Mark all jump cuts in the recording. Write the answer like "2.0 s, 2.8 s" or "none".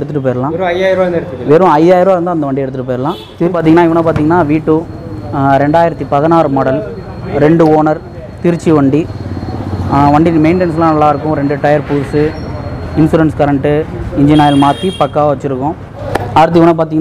3.4 s, 16.0 s